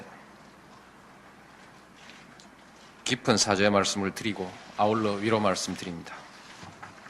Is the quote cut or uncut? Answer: uncut